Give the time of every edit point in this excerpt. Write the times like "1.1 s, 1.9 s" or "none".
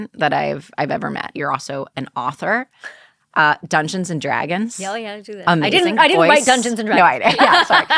1.3 s